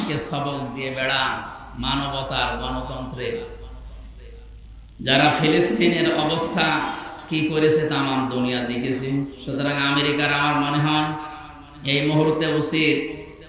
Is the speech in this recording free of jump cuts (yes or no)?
yes